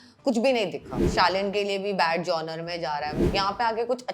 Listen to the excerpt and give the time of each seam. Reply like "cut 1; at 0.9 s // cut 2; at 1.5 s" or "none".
cut 1; at 1.0 s // cut 2; at 3.2 s